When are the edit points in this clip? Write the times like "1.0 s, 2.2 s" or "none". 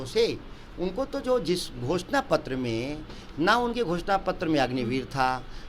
none